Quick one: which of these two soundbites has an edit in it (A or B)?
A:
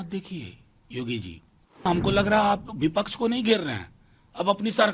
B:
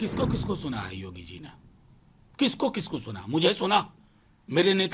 A